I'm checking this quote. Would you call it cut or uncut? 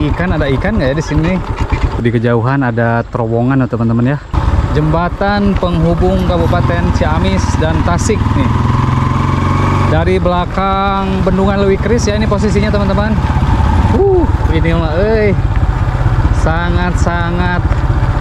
cut